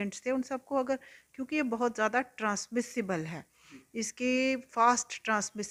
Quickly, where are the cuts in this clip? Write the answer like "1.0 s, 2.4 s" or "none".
none